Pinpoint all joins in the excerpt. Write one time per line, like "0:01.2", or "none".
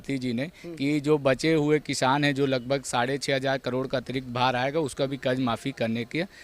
none

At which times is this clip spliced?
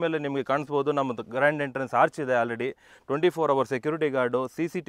none

